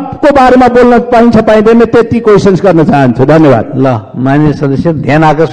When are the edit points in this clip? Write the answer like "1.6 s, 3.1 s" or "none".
none